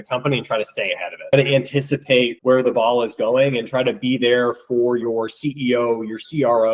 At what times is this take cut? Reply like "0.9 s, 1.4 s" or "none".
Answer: 1.3 s